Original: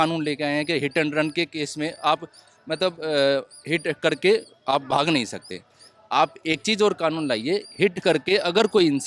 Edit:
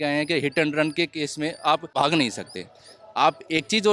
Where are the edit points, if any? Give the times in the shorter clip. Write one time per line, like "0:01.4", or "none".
0:01.9